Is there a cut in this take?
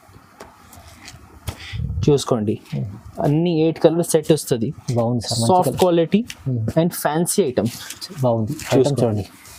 no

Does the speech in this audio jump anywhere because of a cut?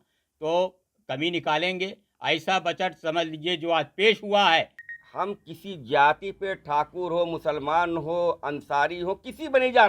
yes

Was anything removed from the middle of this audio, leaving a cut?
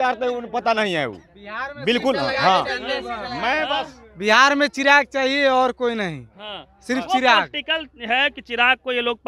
no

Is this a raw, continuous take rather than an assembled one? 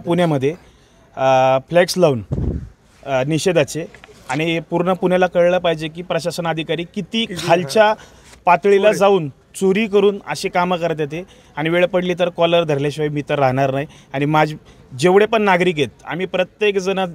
yes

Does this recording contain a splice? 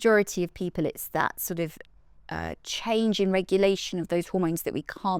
no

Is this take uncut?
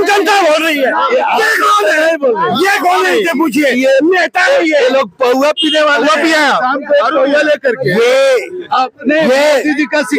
yes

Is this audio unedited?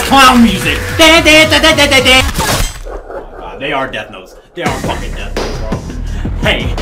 no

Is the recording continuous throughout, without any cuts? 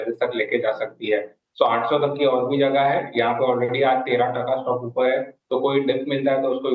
no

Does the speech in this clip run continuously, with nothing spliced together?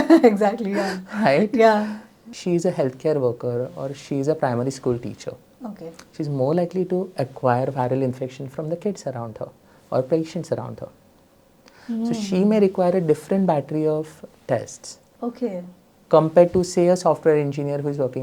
no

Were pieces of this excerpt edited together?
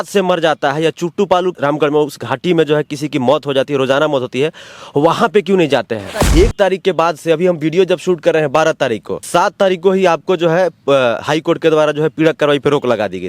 yes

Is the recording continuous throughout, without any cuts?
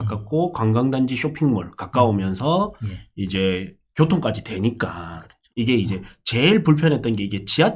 yes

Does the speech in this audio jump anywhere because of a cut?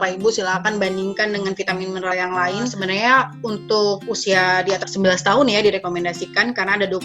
yes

